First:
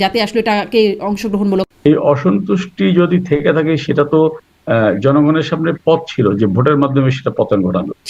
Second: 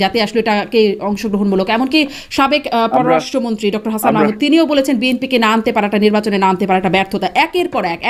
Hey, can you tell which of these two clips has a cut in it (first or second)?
first